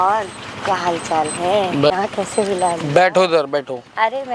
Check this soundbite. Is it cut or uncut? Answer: cut